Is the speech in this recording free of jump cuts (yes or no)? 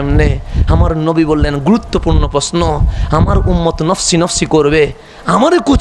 yes